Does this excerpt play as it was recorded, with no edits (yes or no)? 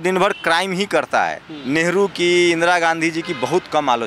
no